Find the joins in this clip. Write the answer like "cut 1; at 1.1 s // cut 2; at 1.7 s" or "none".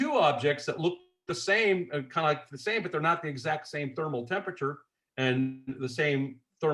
none

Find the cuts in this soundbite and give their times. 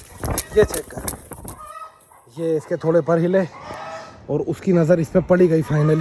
none

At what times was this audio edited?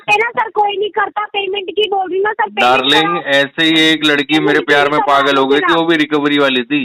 none

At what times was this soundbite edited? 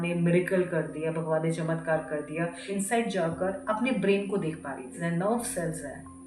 cut 1; at 2.6 s // cut 2; at 5.0 s

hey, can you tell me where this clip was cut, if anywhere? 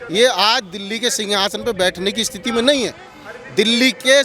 none

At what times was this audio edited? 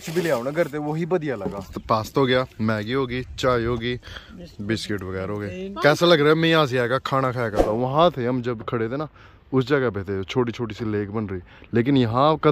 cut 1; at 1.7 s // cut 2; at 7.6 s

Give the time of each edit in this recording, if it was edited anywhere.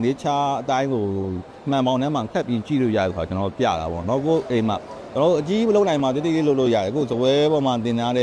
none

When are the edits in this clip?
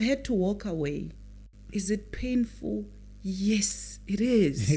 none

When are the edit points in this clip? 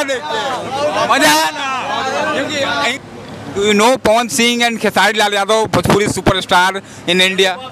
cut 1; at 2.9 s

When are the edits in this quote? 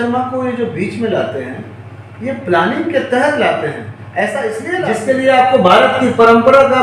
cut 1; at 4.9 s

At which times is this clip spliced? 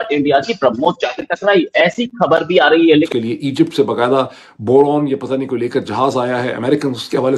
cut 1; at 3.1 s

